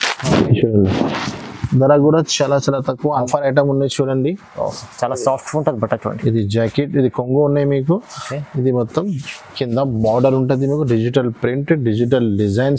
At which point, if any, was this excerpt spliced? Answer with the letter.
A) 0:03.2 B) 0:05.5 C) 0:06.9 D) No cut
A